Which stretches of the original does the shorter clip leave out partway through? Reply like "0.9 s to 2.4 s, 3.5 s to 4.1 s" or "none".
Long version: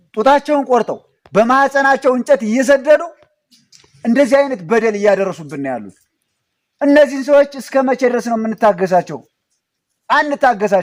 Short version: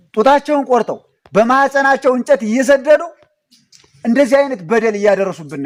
none